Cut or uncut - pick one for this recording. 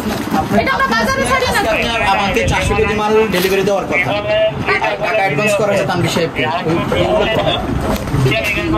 uncut